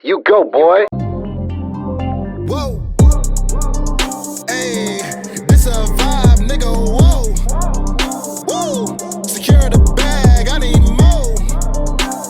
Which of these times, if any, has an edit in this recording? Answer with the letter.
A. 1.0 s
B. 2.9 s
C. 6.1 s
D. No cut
A